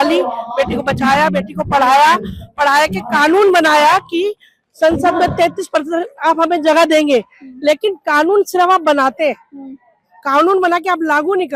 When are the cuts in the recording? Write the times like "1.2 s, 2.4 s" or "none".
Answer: none